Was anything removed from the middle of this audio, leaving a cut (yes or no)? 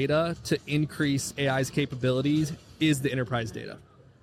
no